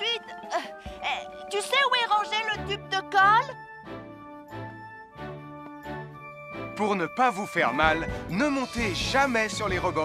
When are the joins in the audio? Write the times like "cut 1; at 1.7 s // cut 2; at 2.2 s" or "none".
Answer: none

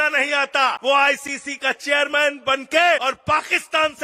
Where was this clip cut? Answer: cut 1; at 0.8 s // cut 2; at 3.0 s

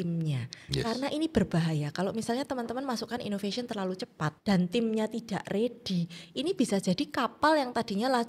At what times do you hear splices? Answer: cut 1; at 4.4 s

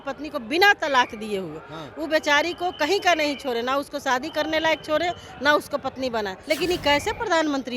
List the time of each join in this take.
cut 1; at 6.3 s

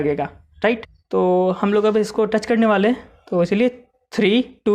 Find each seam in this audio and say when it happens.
cut 1; at 0.9 s

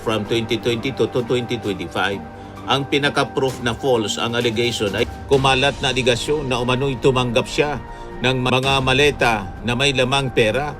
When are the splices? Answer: cut 1; at 5.1 s

